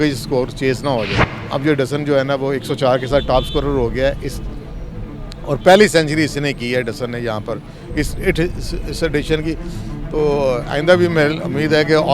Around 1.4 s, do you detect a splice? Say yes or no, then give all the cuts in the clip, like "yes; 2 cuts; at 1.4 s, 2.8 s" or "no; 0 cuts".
yes; 1 cut; at 1.4 s